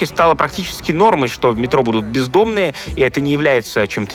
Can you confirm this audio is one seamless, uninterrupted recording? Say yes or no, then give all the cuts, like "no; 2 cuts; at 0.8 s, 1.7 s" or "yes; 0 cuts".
yes; 0 cuts